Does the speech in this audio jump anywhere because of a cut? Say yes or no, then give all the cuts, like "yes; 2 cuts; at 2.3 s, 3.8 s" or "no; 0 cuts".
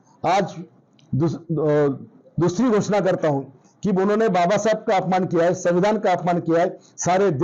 no; 0 cuts